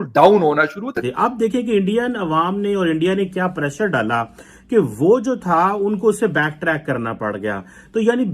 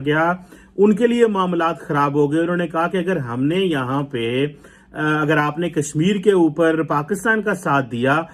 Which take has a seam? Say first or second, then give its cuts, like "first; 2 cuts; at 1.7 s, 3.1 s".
first; 1 cut; at 1.0 s